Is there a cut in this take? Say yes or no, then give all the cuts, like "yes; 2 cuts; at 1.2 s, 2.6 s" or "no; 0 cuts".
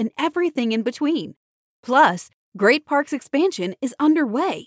no; 0 cuts